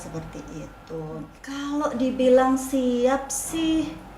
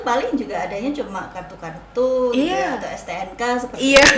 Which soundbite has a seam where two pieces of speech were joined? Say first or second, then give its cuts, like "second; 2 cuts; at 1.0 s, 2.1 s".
first; 1 cut; at 1.4 s